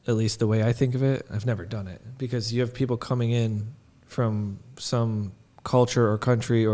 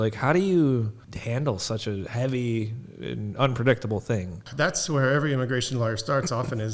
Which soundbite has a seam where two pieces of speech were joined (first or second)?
second